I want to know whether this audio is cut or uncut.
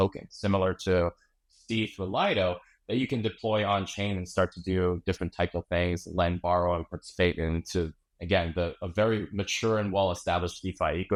uncut